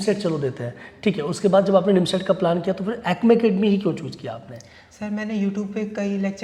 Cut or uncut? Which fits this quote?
uncut